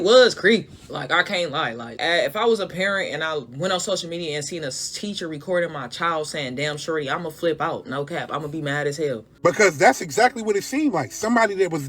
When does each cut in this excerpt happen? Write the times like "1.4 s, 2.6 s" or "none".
1.9 s, 9.3 s